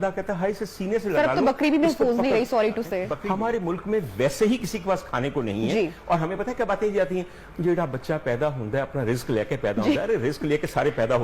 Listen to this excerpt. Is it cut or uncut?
cut